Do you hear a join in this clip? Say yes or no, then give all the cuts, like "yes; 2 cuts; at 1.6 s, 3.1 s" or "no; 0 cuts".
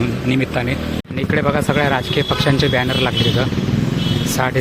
yes; 1 cut; at 1.0 s